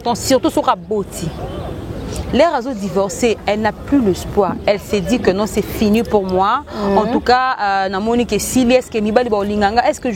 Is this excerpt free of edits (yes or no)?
yes